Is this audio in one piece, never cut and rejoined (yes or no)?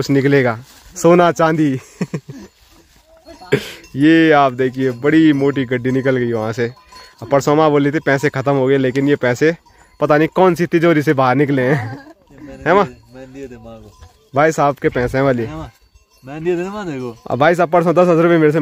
yes